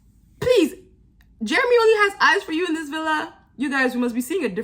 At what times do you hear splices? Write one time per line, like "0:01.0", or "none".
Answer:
none